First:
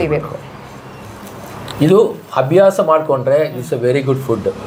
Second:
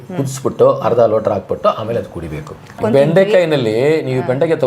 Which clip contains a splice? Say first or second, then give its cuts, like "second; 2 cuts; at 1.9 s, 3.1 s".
second; 1 cut; at 2.8 s